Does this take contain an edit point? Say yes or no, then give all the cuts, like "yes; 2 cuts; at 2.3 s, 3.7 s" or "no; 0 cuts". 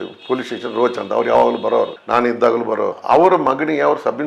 yes; 2 cuts; at 2.0 s, 3.0 s